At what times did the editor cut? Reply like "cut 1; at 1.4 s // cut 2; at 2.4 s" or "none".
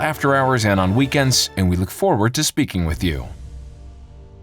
cut 1; at 3.3 s